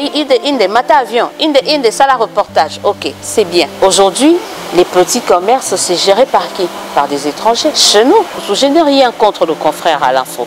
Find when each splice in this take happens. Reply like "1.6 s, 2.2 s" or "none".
3.7 s, 7.8 s, 8.4 s